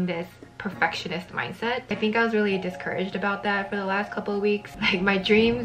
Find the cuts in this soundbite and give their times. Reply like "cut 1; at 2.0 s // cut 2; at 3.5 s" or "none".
cut 1; at 4.7 s